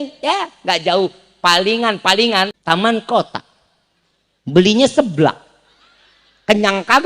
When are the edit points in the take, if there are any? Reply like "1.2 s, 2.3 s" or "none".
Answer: 2.6 s